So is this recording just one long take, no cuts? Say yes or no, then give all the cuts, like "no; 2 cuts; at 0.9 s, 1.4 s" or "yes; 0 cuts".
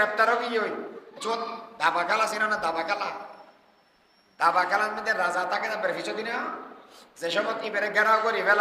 yes; 0 cuts